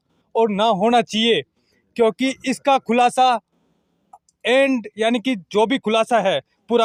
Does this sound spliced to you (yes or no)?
no